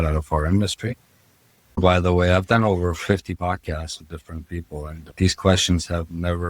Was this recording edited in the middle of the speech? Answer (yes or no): yes